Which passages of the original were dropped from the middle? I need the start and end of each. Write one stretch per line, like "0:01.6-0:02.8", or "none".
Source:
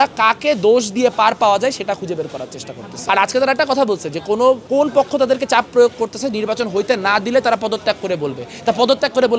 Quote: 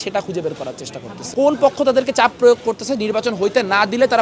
0:03.0-0:04.6